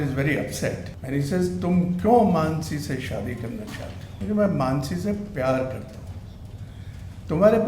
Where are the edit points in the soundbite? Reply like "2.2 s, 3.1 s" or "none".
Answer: 0.9 s, 4.0 s